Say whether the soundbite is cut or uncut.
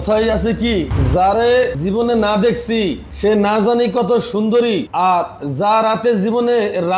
cut